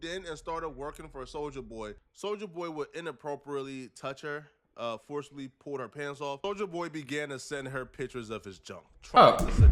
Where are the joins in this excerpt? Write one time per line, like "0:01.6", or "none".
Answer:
0:02.0
0:06.4